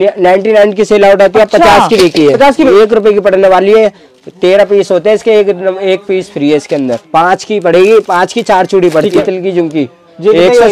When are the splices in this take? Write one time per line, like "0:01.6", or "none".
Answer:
0:02.7
0:07.0
0:09.2